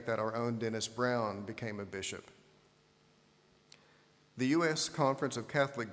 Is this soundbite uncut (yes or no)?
no